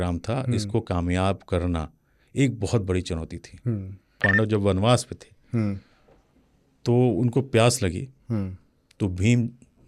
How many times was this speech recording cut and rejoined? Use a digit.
1